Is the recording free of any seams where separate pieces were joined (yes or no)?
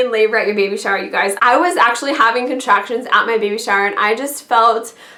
yes